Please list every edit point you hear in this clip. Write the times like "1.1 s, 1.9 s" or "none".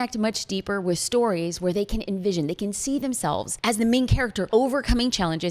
3.5 s, 4.4 s